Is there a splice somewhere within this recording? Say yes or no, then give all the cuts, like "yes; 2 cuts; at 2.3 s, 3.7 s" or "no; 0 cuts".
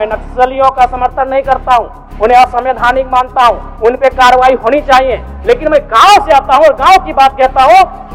no; 0 cuts